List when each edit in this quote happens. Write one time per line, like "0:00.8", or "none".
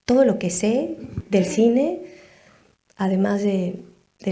0:01.1